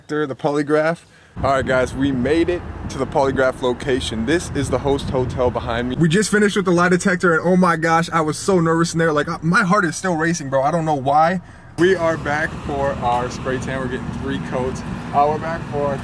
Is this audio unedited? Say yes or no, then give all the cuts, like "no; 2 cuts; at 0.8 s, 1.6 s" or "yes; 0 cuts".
no; 4 cuts; at 1.2 s, 5.9 s, 11.7 s, 14.9 s